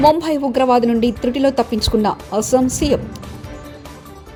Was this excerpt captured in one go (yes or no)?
yes